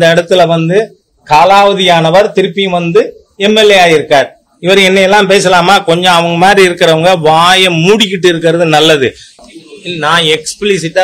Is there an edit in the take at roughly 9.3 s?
yes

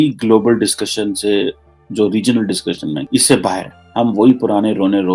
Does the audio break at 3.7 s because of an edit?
yes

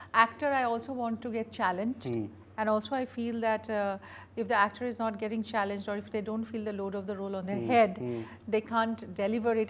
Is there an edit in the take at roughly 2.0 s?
no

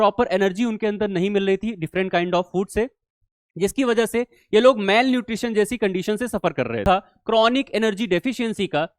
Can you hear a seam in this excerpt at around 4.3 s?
no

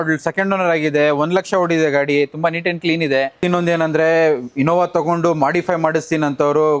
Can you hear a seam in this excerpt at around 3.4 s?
yes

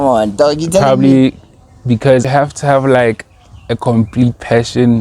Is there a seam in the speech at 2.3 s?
yes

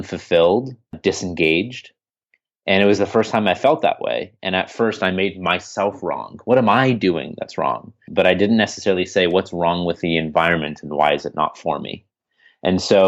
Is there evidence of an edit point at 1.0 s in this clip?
yes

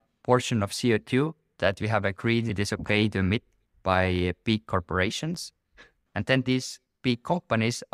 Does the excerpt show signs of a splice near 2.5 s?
yes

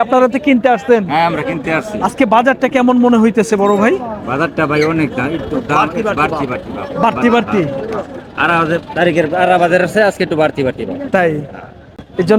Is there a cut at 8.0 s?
no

